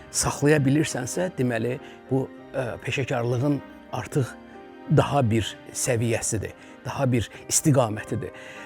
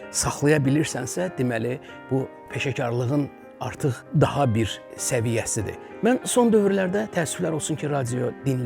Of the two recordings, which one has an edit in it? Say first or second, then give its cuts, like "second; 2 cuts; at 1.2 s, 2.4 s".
second; 3 cuts; at 2.4 s, 4.0 s, 5.8 s